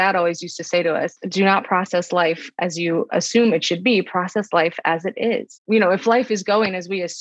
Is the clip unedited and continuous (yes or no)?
no